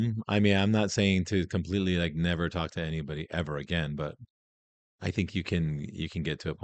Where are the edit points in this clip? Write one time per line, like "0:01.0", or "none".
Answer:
none

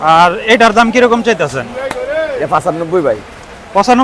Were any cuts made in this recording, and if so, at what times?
none

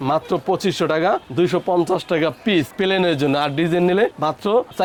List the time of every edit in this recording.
none

